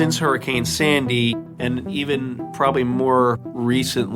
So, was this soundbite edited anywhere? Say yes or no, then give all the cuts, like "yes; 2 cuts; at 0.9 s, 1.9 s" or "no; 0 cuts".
yes; 1 cut; at 1.5 s